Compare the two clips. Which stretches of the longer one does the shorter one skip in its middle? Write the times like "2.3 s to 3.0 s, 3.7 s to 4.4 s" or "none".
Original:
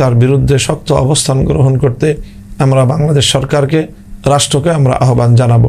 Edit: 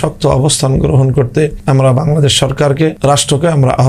2.2 s to 2.5 s, 3.9 s to 4.2 s